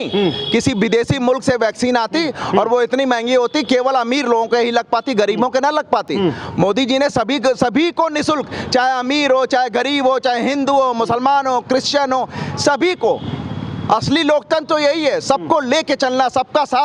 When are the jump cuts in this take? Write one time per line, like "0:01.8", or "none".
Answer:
none